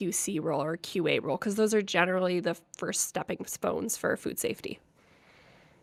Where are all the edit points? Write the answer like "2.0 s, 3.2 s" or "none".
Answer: none